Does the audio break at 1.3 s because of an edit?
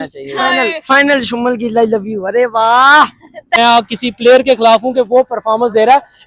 no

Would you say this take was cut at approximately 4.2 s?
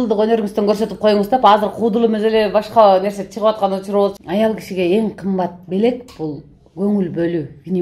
yes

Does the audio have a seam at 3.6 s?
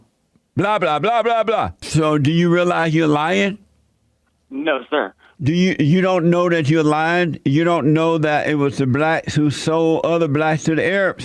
no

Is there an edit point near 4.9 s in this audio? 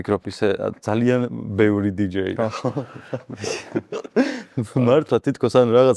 no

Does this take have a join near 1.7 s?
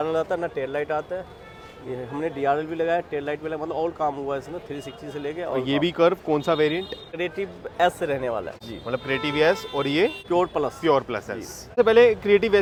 no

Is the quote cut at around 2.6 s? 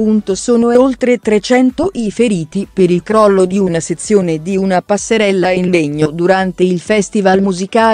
no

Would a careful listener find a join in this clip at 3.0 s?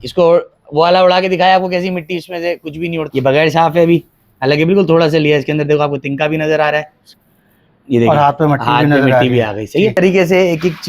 yes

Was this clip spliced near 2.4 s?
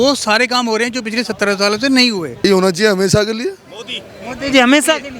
yes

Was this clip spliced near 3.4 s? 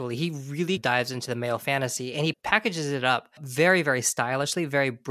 yes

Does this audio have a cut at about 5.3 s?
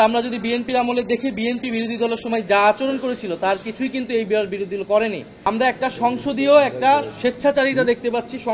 yes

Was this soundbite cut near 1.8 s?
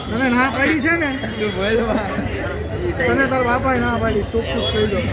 no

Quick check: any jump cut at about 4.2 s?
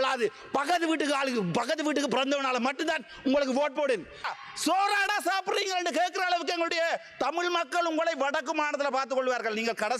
yes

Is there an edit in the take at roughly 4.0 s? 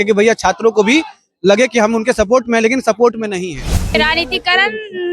yes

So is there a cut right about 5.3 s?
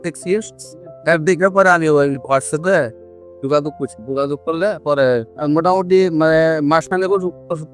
yes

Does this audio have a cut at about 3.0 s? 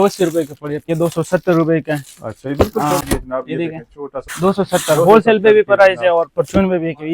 yes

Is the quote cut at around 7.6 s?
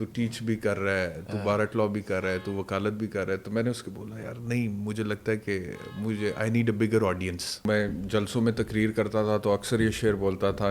yes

